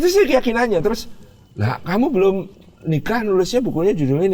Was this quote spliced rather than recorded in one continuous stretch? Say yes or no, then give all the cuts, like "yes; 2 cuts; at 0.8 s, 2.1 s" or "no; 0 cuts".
no; 0 cuts